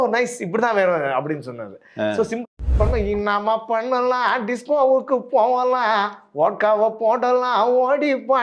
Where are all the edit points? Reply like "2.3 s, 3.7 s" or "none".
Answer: 2.6 s